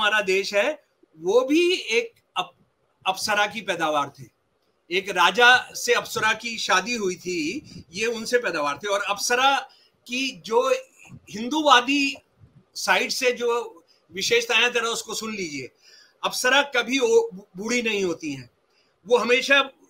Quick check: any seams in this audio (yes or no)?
no